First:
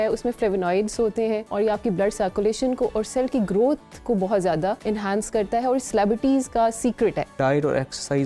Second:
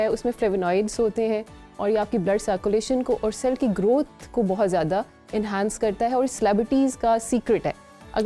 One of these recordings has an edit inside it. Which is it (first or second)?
first